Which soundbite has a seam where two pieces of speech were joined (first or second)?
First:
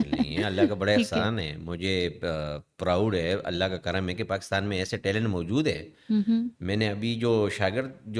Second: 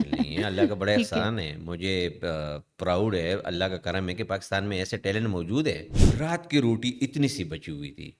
second